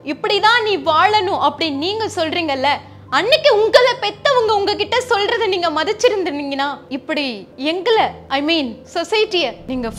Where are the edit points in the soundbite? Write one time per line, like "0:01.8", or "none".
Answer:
none